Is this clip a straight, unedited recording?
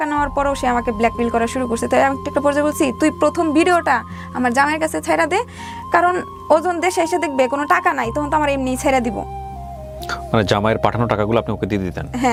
yes; 0 cuts

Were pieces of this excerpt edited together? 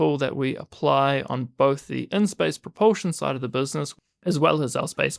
yes; 1 cut; at 3.9 s

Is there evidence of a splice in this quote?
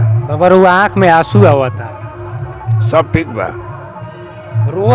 no; 0 cuts

